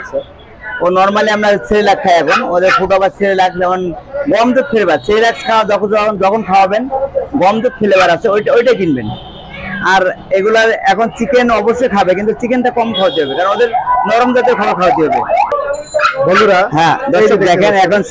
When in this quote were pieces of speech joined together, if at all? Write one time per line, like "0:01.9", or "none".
none